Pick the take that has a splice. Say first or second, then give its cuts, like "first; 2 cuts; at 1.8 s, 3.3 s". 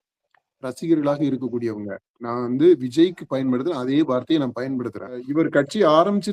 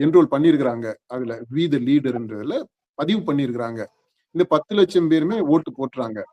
first; 1 cut; at 5.2 s